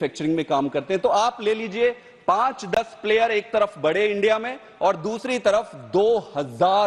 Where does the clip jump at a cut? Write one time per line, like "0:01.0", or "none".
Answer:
none